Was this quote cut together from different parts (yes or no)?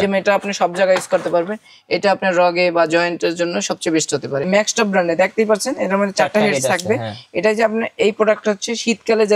yes